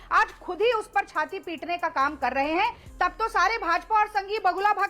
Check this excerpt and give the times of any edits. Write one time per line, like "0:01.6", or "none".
0:02.8